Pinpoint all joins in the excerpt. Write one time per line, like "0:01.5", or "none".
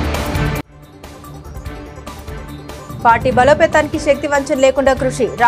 0:03.0